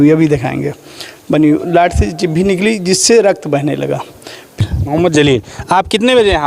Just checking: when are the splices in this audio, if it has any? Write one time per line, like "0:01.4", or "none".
0:04.6